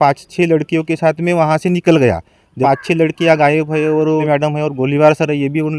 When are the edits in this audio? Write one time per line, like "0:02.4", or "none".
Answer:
0:02.5